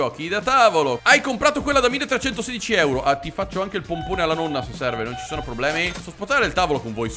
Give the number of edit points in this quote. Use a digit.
2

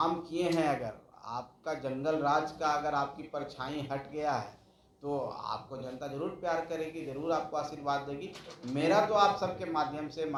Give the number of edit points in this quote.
0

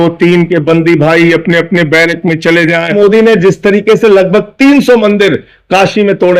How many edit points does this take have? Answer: 1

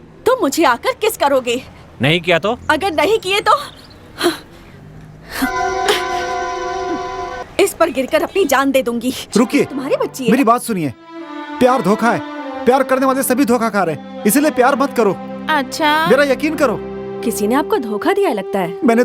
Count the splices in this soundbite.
1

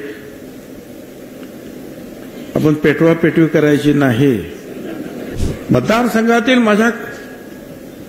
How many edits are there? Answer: 1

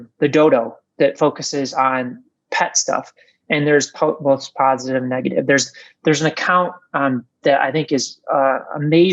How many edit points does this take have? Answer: 1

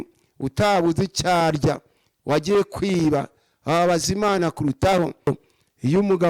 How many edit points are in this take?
1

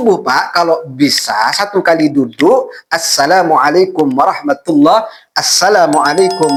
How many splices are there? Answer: 0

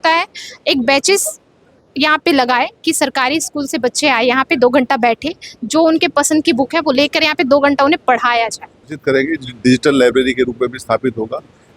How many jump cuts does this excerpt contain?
1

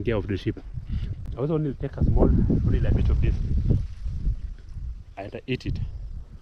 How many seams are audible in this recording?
0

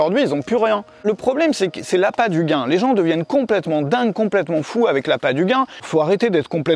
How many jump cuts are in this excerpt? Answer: 2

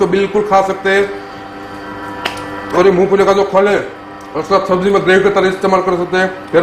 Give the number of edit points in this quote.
0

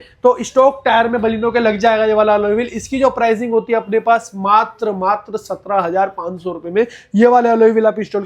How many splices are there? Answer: 0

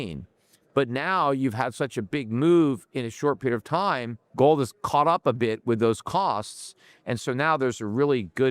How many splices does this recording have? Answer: 1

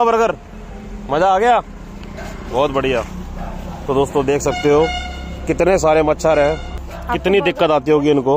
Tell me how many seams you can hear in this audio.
1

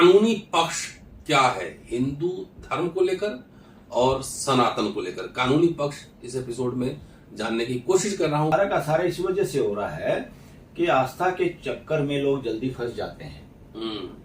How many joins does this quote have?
1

